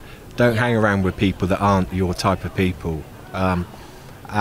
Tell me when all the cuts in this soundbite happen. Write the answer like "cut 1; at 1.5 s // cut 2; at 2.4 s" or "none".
none